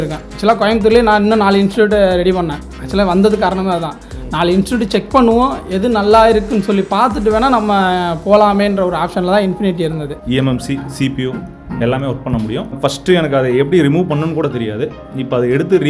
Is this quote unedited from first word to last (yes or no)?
no